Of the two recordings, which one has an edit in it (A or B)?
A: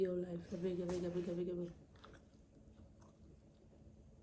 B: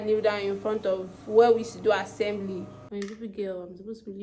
B